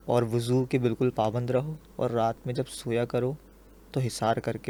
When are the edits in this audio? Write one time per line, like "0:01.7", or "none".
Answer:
none